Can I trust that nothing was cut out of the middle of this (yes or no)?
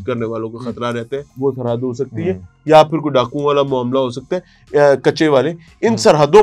no